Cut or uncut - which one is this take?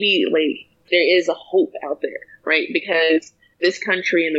cut